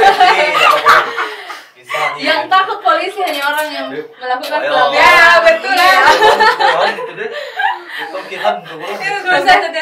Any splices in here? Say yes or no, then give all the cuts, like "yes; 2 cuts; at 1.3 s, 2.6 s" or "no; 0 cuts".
no; 0 cuts